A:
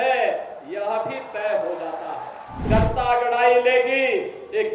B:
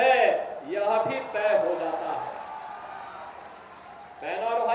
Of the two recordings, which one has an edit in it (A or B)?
A